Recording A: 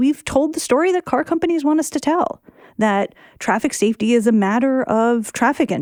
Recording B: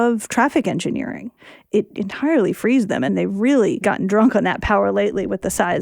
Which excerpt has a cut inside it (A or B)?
B